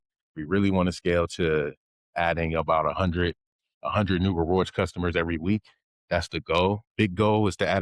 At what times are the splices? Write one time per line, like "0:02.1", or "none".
0:06.9